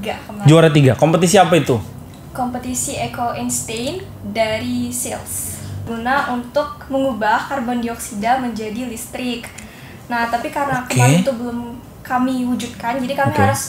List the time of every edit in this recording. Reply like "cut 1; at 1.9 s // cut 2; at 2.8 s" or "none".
cut 1; at 5.9 s